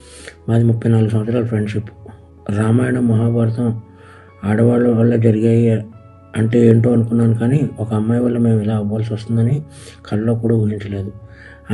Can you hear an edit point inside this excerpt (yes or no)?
no